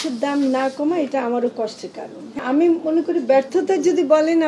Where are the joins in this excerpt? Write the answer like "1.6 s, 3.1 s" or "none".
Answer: 2.4 s